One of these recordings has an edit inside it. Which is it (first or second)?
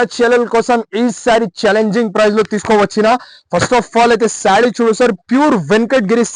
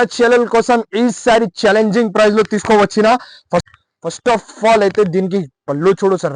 second